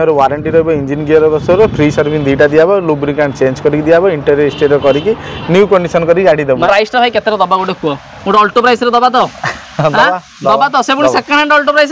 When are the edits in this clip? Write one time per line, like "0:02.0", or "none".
0:06.6